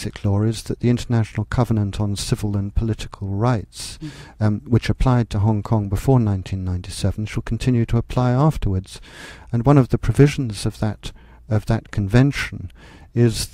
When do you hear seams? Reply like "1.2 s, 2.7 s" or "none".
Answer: 10.5 s